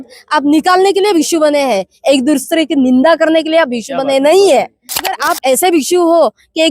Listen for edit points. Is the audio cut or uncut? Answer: cut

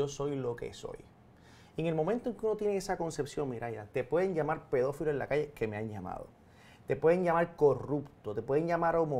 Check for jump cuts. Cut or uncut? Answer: uncut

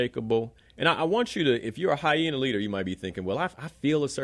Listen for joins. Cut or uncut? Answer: uncut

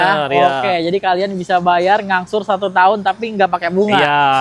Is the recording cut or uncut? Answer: uncut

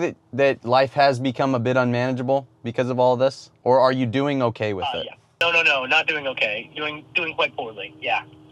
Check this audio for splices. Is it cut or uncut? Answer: cut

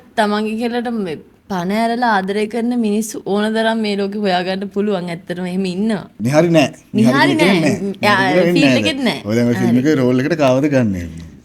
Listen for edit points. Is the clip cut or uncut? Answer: cut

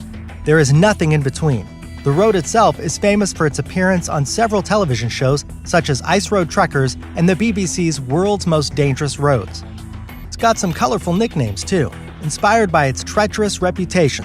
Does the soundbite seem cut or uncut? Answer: cut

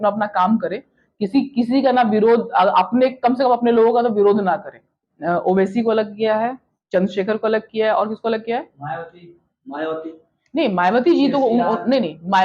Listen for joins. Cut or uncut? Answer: cut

